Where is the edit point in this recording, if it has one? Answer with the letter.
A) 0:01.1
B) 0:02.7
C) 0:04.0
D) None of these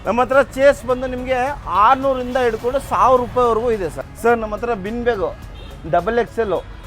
C